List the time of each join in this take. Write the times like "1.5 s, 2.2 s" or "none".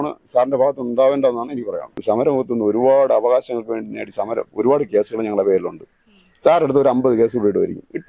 1.9 s